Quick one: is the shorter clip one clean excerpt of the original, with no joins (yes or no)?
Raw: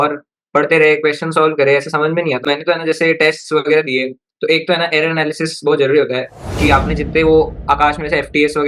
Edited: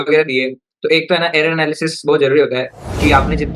yes